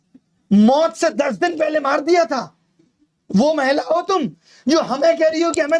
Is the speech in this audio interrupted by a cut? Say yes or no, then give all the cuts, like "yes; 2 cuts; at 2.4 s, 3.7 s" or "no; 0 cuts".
no; 0 cuts